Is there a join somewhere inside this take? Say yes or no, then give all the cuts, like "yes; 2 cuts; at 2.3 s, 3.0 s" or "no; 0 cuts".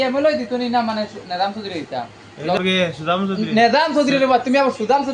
yes; 1 cut; at 2.6 s